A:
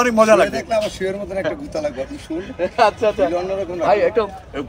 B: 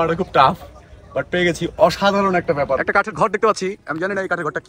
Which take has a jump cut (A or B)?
B